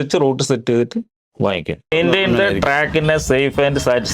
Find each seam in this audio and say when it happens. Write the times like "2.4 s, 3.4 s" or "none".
1.9 s